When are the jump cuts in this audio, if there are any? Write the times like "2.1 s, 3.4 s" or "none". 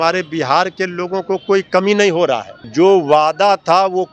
2.6 s